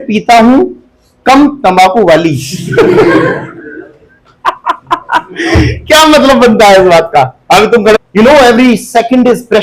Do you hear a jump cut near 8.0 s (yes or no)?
yes